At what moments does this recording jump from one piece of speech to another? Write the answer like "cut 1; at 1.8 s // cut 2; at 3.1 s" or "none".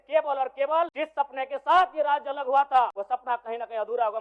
cut 1; at 0.9 s // cut 2; at 3.0 s